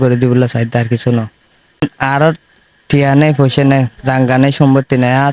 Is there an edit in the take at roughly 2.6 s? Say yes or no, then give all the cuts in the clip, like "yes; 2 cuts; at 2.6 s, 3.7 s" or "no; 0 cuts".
no; 0 cuts